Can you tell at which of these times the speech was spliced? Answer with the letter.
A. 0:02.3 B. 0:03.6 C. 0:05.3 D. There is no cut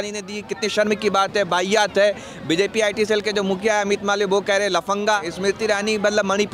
C